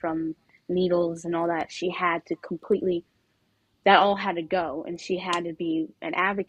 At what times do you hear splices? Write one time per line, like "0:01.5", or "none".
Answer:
none